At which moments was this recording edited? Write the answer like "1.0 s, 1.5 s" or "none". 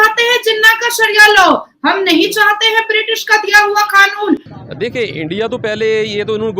4.5 s

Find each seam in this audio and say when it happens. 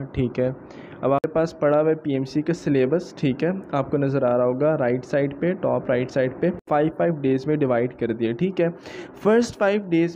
1.3 s, 6.6 s

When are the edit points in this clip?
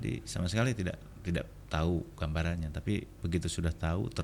1.1 s

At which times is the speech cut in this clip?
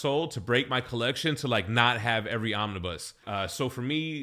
3.1 s

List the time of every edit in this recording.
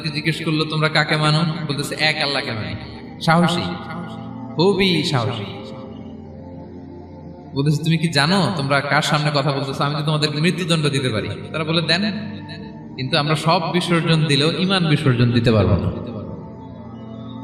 none

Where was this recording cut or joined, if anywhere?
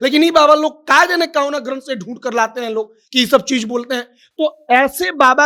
none

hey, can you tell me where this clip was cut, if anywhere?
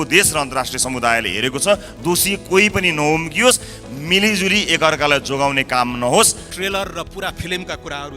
6.5 s

